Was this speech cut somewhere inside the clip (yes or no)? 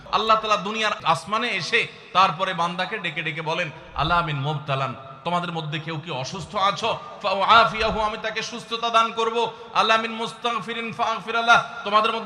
yes